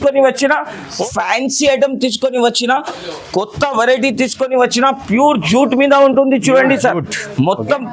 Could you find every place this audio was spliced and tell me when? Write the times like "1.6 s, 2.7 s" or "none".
1.0 s